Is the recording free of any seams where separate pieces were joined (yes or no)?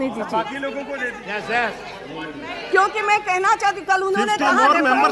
yes